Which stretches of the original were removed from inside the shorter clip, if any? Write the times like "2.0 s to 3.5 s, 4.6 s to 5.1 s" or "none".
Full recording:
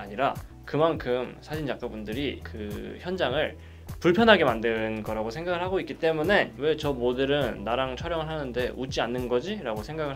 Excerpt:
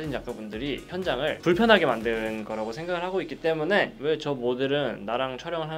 2.6 s to 3.6 s

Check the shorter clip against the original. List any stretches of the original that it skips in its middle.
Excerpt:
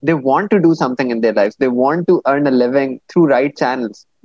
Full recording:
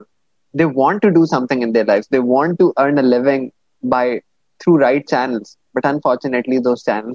3.5 s to 4.5 s

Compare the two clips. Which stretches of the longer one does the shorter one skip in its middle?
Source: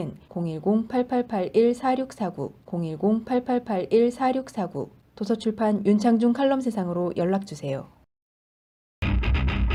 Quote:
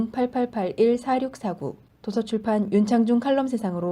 2.5 s to 4.9 s

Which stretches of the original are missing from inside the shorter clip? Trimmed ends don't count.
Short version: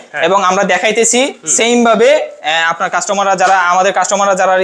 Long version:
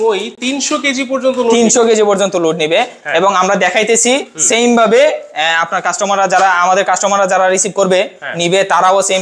none

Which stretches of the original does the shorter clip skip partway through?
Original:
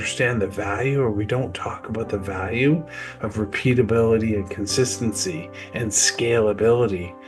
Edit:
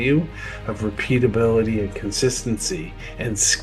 none

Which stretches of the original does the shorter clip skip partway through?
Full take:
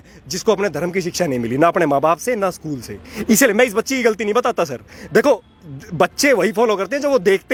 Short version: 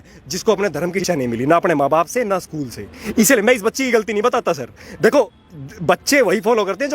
1.0 s to 1.1 s

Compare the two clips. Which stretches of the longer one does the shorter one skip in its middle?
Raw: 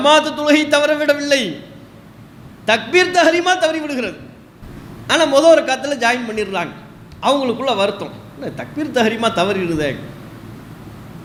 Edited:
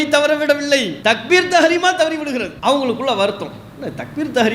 1.5 s to 2.5 s, 4.1 s to 7.1 s

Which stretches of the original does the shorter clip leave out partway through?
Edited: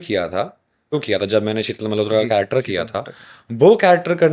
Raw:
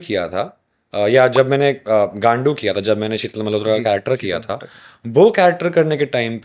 0.9 s to 2.5 s

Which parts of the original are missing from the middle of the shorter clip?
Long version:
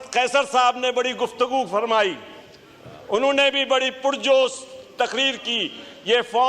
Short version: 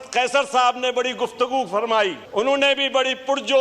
2.2 s to 3.0 s

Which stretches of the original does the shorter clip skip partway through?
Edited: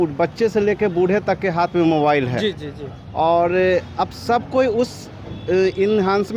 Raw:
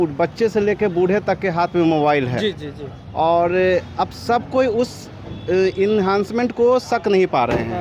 none

